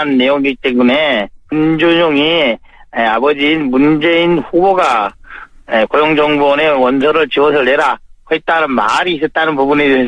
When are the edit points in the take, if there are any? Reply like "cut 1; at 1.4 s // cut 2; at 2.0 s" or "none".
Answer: cut 1; at 2.7 s